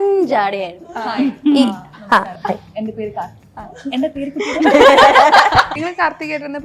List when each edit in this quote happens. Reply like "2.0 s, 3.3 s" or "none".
5.7 s

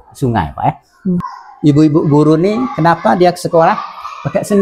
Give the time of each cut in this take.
1.4 s

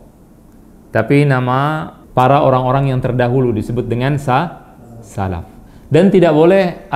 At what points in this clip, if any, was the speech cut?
1.9 s

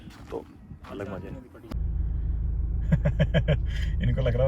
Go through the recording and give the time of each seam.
1.6 s

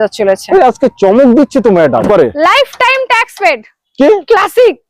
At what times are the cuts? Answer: 2.0 s

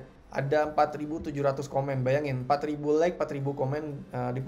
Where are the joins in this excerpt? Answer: none

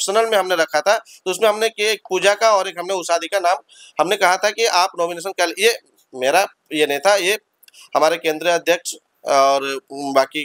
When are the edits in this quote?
none

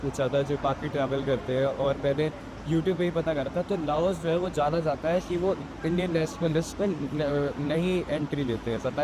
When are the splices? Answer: none

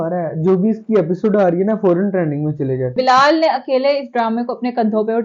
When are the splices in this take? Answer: 2.9 s

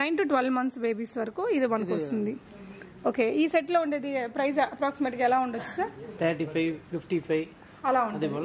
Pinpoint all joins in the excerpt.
none

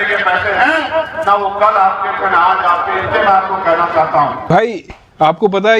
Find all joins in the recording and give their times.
4.5 s

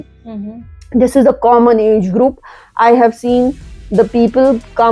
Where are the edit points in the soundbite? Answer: none

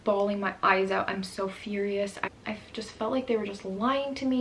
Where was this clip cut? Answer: 2.2 s

